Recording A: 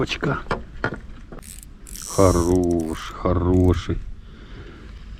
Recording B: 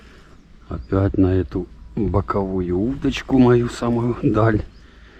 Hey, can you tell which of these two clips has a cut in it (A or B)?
A